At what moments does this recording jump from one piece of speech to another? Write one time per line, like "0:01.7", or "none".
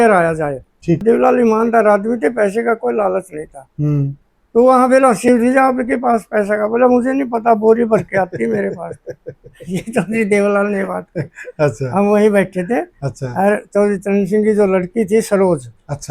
0:01.0